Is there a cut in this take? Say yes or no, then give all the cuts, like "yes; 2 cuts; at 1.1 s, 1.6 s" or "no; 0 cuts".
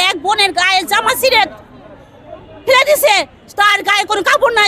no; 0 cuts